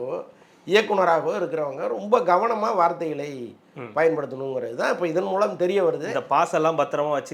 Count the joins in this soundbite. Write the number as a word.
zero